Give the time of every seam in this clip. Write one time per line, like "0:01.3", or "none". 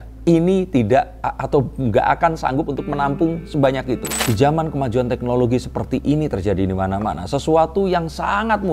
0:03.9